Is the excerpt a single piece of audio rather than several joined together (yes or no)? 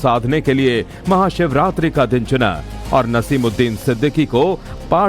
no